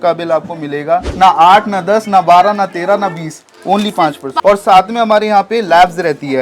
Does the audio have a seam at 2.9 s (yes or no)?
no